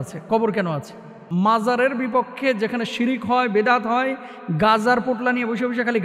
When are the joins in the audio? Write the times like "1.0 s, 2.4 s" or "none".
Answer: 1.2 s